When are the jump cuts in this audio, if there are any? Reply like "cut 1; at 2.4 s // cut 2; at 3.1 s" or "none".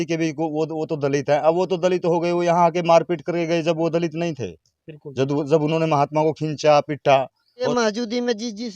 cut 1; at 7.6 s